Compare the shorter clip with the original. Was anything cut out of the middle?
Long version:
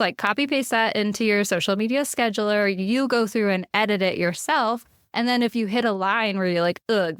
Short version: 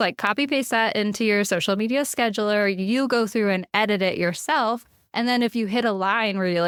no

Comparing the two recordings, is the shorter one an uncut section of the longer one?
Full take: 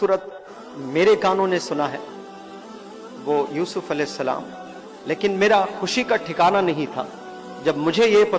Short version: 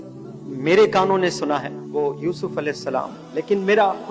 no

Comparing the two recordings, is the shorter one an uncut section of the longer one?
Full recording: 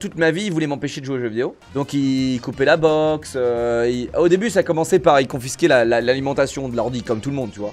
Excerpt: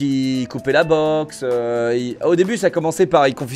yes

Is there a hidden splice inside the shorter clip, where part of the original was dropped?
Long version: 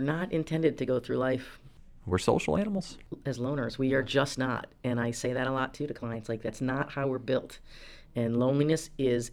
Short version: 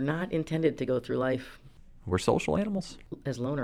no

